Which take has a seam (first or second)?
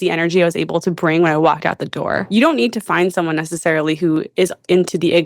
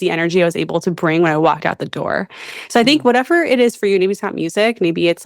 first